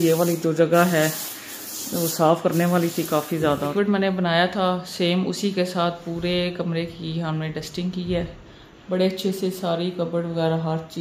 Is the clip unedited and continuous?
no; 1 cut; at 3.7 s

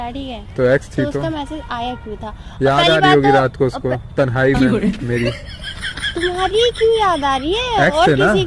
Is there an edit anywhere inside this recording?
no; 0 cuts

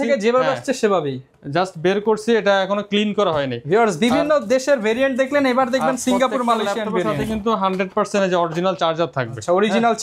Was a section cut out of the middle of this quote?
no; 0 cuts

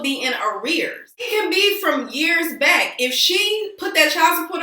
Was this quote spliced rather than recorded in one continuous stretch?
yes; 1 cut; at 1.3 s

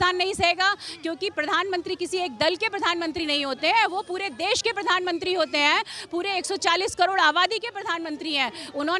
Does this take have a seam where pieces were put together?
no; 0 cuts

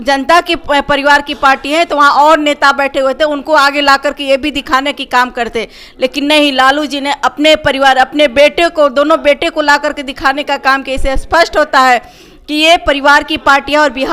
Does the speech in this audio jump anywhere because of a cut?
no; 0 cuts

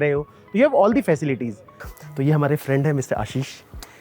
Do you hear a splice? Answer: yes; 1 cut; at 1.8 s

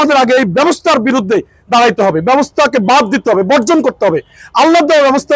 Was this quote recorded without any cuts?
yes; 0 cuts

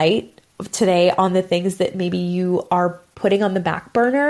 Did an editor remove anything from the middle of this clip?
yes; 1 cut; at 3.1 s

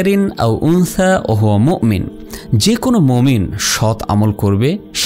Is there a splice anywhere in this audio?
no; 0 cuts

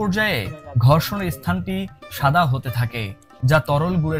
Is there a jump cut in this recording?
no; 0 cuts

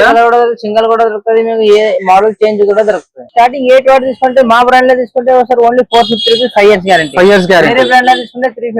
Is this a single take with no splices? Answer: no; 1 cut; at 3.2 s

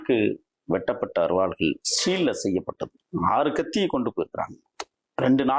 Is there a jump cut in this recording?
yes; 1 cut; at 2.9 s

